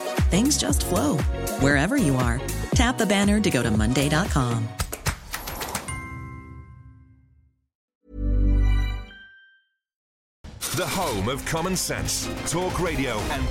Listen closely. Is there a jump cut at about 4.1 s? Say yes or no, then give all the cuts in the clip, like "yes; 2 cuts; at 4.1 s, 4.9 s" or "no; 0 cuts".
no; 2 cuts; at 7.9 s, 10.2 s